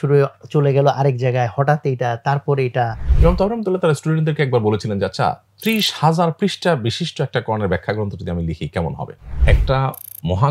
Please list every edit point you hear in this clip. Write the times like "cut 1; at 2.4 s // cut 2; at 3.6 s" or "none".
cut 1; at 3.0 s // cut 2; at 9.4 s